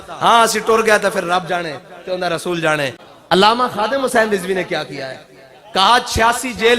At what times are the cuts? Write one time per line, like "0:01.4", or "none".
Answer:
0:03.1